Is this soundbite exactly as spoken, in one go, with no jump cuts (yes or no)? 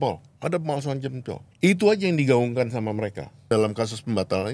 no